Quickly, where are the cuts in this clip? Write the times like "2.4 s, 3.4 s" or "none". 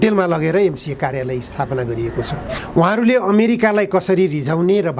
2.6 s